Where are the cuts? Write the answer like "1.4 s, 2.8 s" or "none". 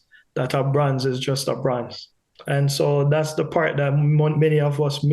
2.2 s